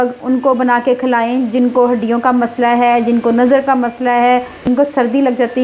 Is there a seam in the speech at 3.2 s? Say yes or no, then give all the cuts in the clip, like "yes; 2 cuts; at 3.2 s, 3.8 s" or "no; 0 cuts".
no; 1 cut; at 4.6 s